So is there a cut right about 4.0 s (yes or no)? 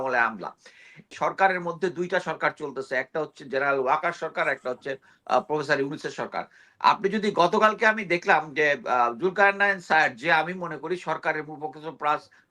no